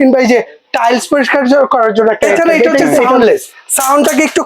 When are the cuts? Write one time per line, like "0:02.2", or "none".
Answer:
0:03.1